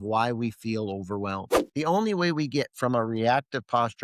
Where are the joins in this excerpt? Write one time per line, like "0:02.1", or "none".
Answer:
0:01.6